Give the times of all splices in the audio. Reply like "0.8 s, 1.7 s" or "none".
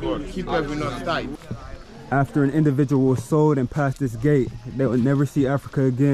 1.3 s